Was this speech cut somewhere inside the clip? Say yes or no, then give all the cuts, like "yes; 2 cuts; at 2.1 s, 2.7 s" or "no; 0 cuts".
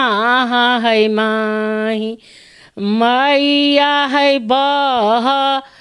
no; 0 cuts